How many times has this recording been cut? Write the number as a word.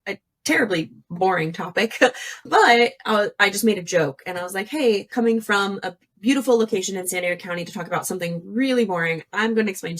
one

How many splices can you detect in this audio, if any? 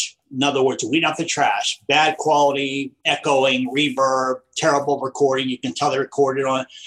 one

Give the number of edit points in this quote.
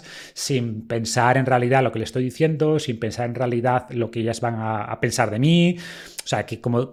zero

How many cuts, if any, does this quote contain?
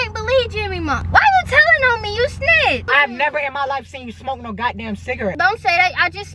three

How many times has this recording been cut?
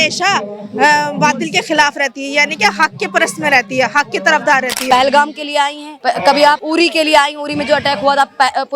three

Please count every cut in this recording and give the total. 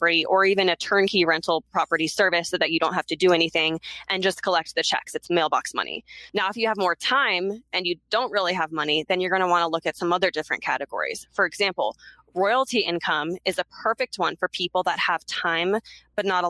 one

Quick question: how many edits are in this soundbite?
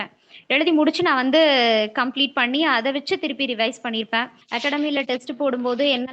one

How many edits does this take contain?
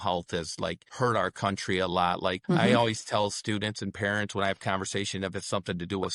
two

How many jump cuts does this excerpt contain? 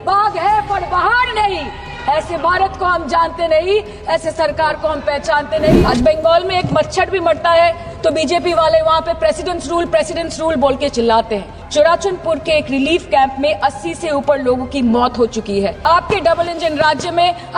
three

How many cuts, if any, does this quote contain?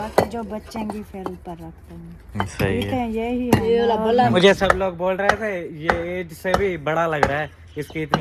one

